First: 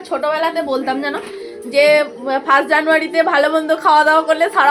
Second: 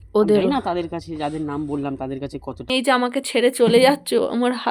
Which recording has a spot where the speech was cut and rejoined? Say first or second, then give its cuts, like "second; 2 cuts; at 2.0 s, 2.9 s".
second; 1 cut; at 2.7 s